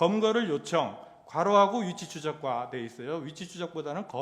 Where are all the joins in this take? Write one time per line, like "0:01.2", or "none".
none